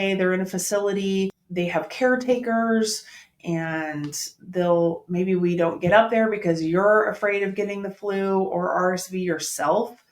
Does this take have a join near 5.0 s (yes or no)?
no